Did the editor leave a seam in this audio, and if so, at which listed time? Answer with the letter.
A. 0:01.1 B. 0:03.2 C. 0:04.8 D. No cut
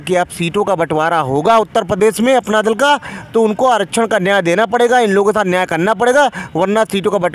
D